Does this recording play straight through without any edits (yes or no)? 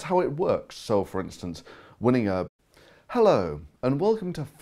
yes